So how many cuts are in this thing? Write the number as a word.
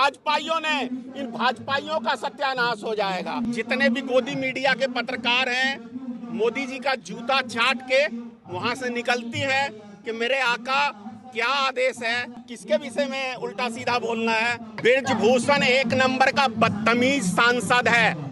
three